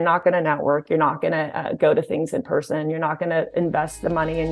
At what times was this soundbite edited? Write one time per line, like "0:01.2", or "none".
none